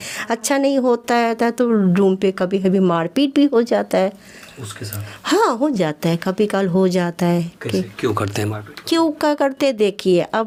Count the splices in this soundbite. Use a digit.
0